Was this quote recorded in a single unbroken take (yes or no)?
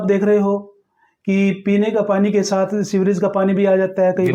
yes